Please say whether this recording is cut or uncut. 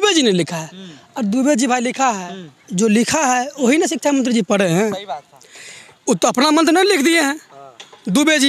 uncut